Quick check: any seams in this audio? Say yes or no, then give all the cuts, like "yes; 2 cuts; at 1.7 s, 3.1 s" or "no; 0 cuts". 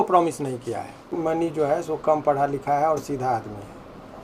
yes; 1 cut; at 1.2 s